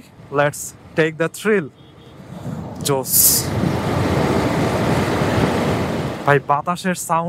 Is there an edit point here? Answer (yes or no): no